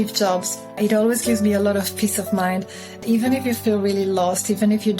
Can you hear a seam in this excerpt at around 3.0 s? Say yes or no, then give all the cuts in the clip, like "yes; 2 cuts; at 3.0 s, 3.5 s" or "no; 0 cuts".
yes; 2 cuts; at 0.8 s, 3.0 s